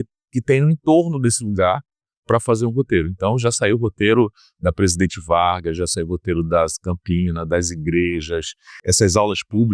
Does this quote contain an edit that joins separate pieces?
yes; 1 cut; at 8.8 s

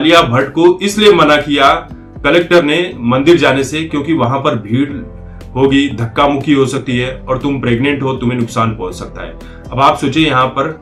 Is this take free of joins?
yes; 0 cuts

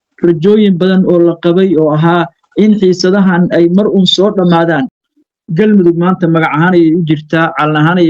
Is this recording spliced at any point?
yes; 1 cut; at 5.0 s

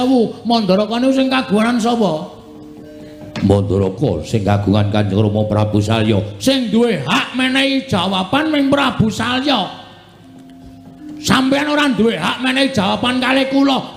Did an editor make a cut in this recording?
no; 0 cuts

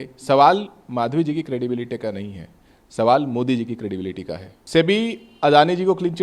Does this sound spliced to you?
yes; 1 cut; at 4.5 s

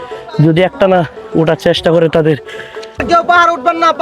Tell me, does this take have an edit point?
yes; 1 cut; at 3.0 s

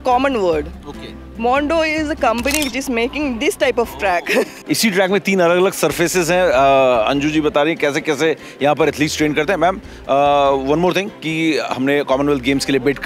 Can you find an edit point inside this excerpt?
yes; 1 cut; at 4.6 s

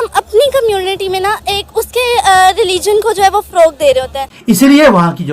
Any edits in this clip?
yes; 1 cut; at 4.2 s

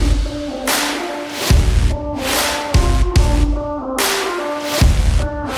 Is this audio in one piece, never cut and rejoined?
yes; 0 cuts

